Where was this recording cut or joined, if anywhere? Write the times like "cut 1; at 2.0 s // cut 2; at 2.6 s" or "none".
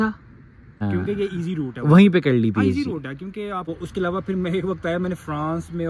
cut 1; at 0.8 s // cut 2; at 3.7 s

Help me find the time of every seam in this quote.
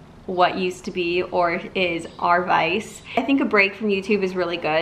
cut 1; at 3.1 s

